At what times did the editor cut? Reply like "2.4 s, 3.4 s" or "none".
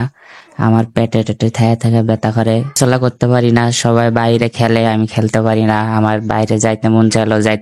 2.7 s